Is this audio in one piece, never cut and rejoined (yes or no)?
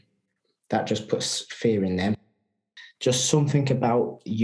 no